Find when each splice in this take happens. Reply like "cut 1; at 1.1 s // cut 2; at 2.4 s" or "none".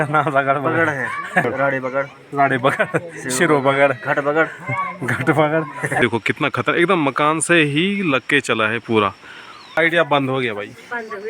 cut 1; at 1.4 s // cut 2; at 6.0 s // cut 3; at 9.8 s